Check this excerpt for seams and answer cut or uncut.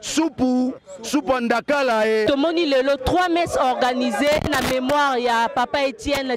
cut